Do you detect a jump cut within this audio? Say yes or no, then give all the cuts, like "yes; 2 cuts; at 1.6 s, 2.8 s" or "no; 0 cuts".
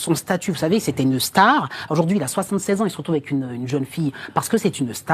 no; 0 cuts